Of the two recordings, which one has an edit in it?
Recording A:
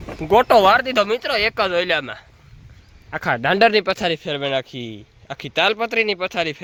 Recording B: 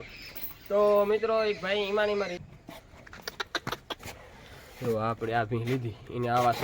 B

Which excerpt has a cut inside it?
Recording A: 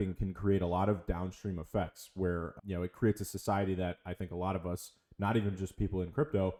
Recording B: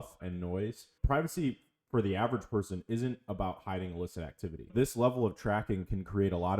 B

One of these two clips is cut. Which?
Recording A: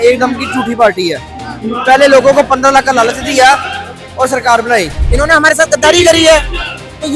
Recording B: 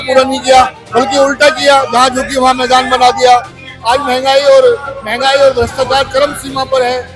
A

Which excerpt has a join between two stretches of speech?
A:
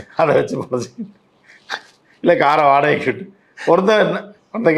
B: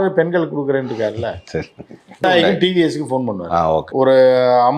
B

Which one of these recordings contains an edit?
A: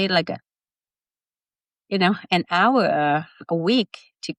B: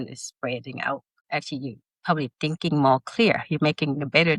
B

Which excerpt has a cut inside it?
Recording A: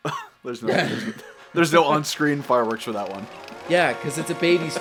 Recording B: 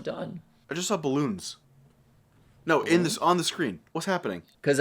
B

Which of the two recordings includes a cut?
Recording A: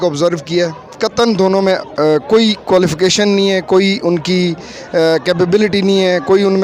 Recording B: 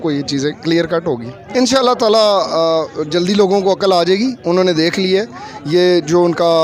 B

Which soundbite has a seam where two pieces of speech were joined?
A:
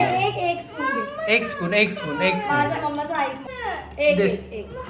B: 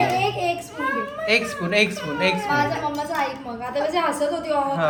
A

